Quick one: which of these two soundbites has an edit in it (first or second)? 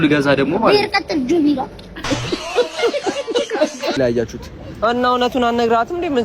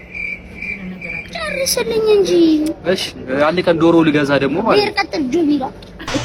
first